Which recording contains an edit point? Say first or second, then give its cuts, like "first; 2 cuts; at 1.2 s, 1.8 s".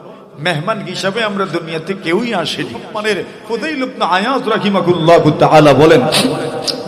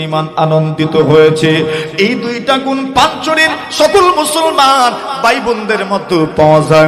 first; 1 cut; at 2.9 s